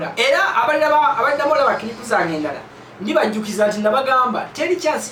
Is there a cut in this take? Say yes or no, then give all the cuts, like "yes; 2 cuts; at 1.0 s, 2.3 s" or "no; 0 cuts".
no; 0 cuts